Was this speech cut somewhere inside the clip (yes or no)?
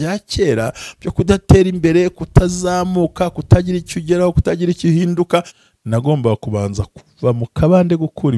yes